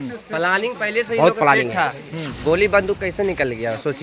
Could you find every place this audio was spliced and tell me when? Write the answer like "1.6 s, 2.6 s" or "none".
none